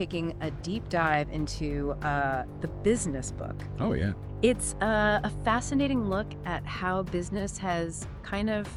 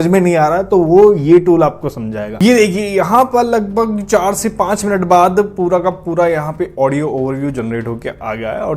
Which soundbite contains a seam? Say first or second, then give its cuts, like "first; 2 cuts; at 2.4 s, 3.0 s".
second; 1 cut; at 2.4 s